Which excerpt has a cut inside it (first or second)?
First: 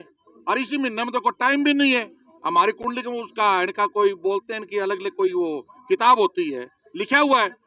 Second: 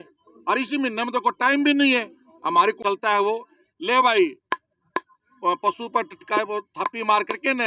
second